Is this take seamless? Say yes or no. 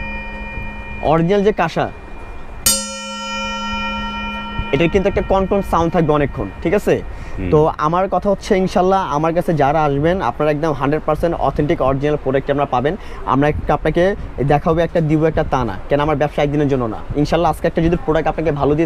yes